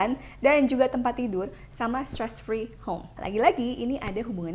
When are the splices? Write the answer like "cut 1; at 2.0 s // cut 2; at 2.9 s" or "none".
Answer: cut 1; at 3.1 s

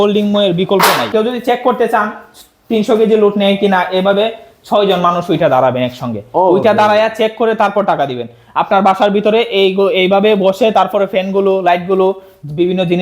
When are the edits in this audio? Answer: cut 1; at 1.1 s

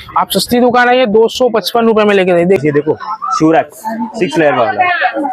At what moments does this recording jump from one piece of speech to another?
cut 1; at 2.6 s

